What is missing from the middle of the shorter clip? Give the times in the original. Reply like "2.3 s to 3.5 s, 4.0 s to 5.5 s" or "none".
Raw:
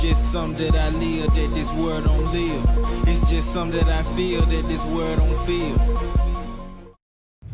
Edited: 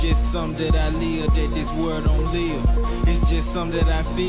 none